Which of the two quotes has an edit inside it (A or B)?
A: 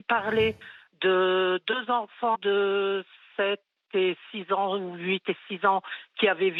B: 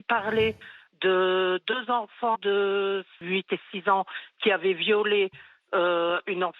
B